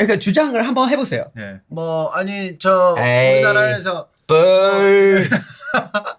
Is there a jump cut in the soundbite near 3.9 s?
no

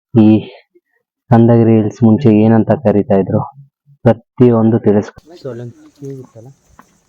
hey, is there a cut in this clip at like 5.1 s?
yes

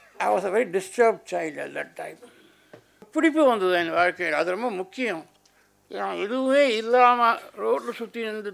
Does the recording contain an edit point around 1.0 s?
no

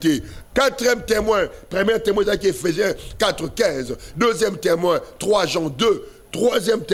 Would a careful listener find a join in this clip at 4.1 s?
no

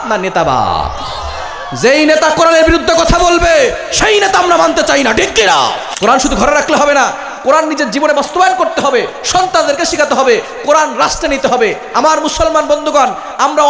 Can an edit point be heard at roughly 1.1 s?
no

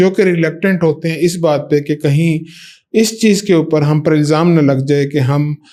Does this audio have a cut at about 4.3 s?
no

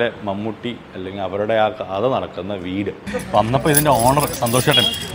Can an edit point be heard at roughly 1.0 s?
no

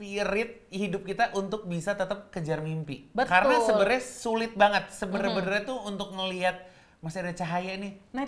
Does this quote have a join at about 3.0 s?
no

